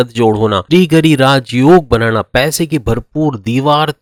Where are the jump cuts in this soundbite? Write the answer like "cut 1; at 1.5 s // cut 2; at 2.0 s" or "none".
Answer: none